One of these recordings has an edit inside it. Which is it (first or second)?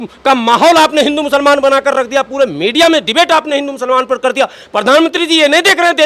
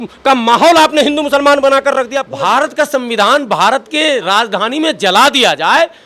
second